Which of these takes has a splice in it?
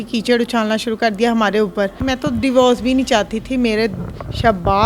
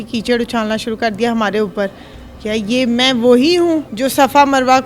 first; 1 cut; at 2.0 s

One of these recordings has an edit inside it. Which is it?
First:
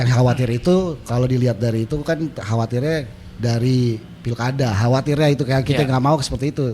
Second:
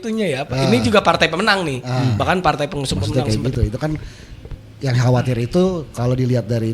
second; 1 cut; at 3.0 s

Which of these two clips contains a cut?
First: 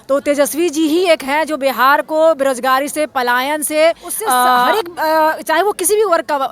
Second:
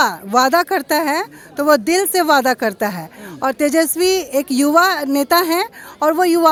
first; 1 cut; at 4.7 s

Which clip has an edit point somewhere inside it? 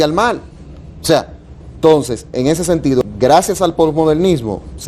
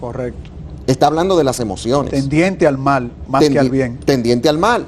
first; 1 cut; at 3.0 s

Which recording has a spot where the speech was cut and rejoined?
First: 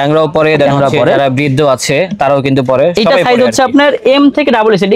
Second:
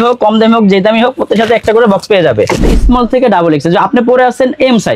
second; 1 cut; at 2.7 s

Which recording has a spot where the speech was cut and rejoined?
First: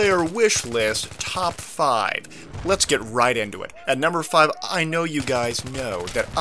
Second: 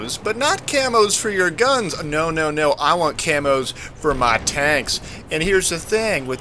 second; 1 cut; at 3.2 s

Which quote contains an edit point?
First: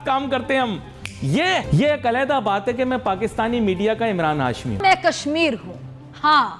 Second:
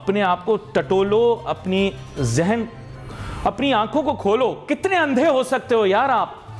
first; 2 cuts; at 1.7 s, 4.8 s

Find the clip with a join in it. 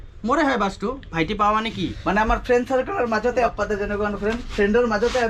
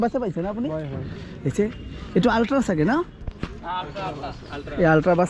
first; 2 cuts; at 2.0 s, 3.5 s

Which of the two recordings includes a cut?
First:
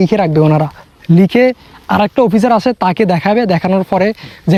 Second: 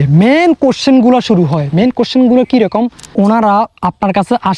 second; 1 cut; at 3.1 s

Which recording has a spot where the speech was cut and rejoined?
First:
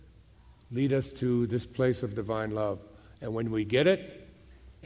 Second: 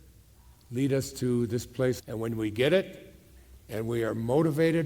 second; 1 cut; at 2.0 s

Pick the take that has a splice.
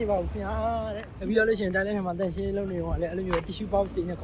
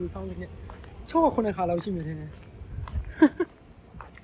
first; 1 cut; at 1.1 s

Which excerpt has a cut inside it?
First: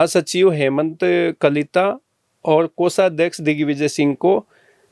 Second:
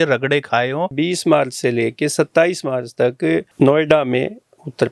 second; 1 cut; at 0.9 s

